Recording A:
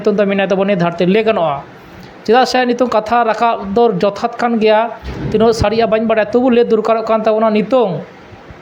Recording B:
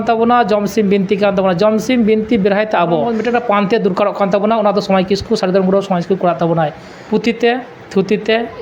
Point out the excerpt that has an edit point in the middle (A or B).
B